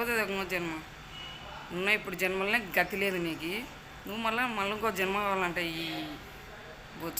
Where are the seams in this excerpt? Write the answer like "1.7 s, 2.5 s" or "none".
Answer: none